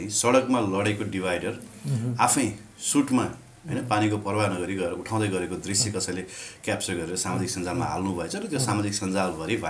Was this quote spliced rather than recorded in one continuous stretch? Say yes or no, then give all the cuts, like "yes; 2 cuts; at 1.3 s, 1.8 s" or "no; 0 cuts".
no; 0 cuts